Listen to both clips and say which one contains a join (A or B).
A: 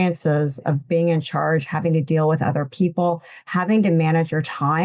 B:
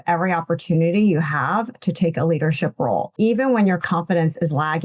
B